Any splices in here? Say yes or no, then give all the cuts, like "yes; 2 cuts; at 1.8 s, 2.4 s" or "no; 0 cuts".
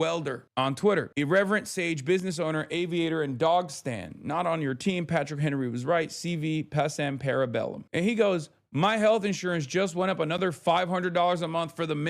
yes; 1 cut; at 7.9 s